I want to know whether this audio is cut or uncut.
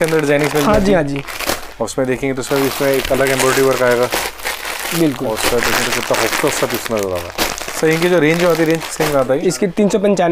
uncut